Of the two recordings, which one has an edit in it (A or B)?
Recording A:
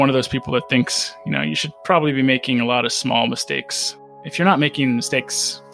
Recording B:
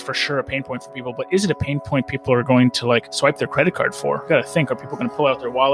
B